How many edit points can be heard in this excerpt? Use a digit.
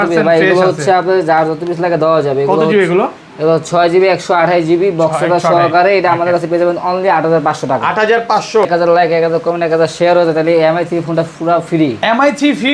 1